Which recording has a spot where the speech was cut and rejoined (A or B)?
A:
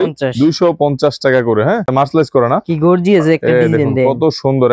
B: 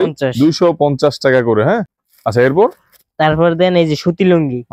A